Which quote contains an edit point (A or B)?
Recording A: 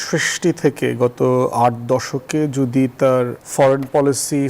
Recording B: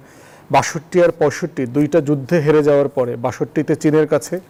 A